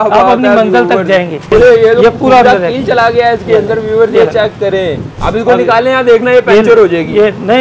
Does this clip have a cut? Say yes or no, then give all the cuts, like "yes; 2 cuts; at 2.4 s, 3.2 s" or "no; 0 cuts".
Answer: yes; 1 cut; at 1.4 s